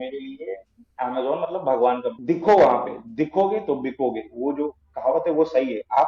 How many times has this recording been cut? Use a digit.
1